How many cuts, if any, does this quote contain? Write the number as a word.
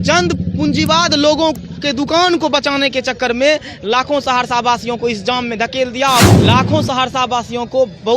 one